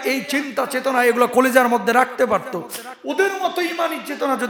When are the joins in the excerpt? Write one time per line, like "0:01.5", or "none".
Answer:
none